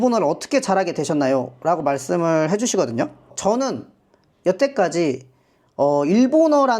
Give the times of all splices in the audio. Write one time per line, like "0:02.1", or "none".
0:03.2

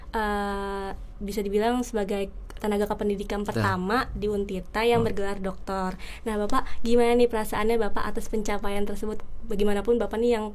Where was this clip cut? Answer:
none

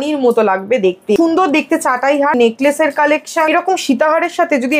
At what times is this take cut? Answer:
0:01.2
0:02.3
0:03.5

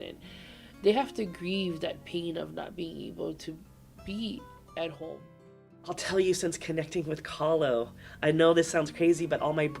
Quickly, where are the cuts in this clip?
0:05.7

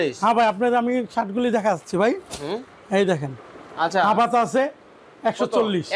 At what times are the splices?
none

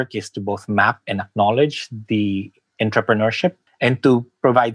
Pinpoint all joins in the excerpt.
0:03.6

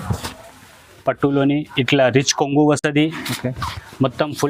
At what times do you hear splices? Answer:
none

